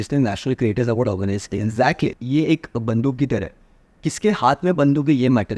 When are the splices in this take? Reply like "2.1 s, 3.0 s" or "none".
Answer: 2.2 s